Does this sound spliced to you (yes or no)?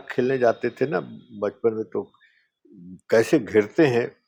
no